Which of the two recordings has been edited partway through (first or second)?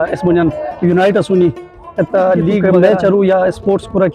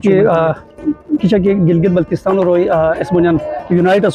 first